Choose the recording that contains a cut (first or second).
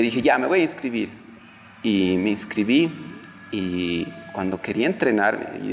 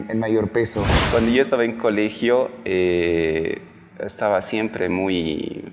second